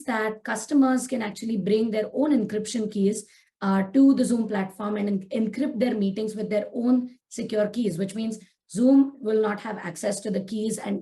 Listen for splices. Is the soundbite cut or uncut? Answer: uncut